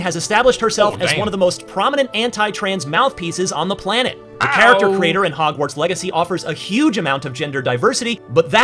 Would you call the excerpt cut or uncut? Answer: uncut